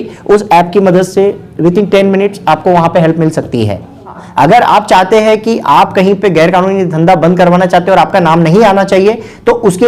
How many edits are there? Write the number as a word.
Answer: one